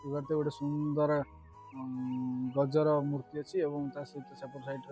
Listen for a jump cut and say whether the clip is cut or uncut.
uncut